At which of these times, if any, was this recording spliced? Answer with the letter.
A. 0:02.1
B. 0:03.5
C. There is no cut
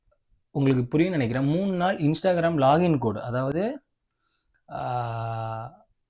C